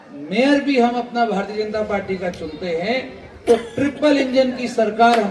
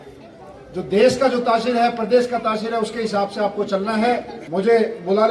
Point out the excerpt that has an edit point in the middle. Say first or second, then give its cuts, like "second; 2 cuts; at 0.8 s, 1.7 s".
second; 1 cut; at 4.4 s